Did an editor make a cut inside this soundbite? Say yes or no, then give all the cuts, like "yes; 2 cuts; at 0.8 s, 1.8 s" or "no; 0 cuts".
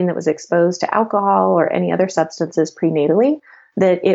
no; 0 cuts